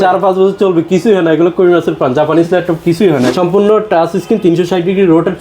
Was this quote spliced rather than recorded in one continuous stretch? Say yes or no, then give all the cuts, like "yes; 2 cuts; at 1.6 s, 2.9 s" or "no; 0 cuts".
yes; 1 cut; at 3.3 s